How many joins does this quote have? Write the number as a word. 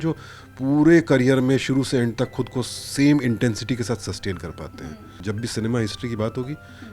one